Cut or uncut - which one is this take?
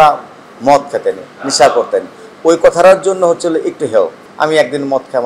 uncut